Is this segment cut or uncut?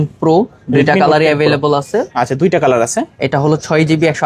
uncut